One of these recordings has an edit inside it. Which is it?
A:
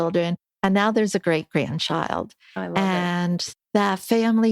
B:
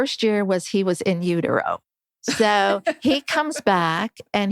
A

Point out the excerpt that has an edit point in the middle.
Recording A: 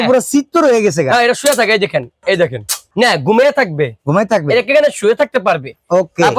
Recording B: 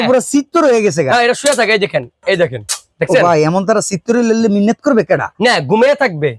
A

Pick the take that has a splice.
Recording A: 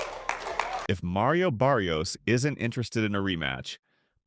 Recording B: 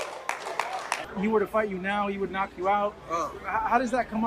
B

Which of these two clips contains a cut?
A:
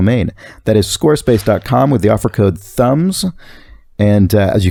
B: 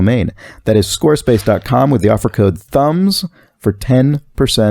B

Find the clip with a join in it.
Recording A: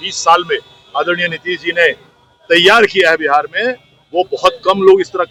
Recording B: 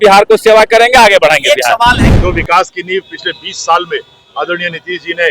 B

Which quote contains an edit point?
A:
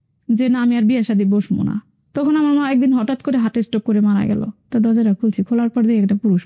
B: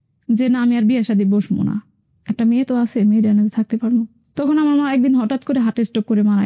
A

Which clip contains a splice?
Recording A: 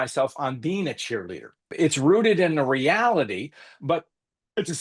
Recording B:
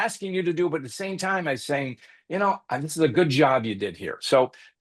A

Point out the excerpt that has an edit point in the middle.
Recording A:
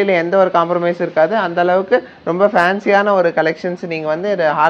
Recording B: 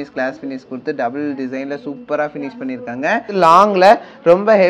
B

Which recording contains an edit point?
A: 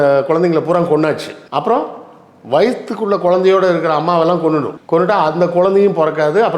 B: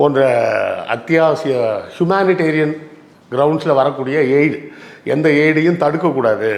A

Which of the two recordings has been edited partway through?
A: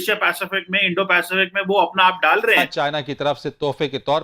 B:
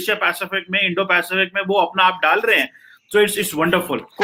A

